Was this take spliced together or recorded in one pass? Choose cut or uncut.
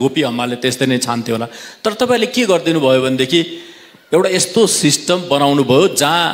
uncut